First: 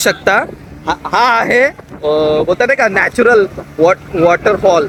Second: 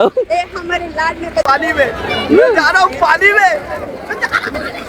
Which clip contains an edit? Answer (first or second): second